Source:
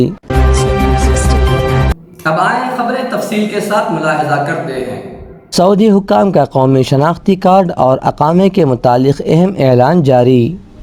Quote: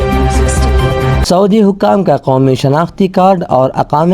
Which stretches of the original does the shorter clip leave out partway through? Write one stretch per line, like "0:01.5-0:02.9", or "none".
0:01.9-0:05.5